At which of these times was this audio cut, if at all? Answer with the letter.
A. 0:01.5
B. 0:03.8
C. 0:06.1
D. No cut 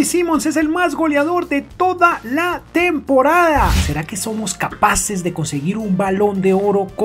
B